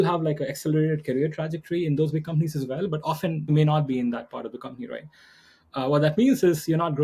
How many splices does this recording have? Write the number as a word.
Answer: one